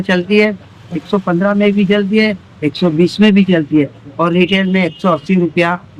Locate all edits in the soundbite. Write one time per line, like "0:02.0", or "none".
none